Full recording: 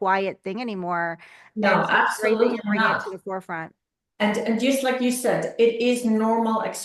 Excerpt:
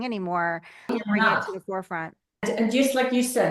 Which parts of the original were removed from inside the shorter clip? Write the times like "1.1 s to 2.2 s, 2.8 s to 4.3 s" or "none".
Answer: 1.5 s to 2.5 s, 4.0 s to 4.3 s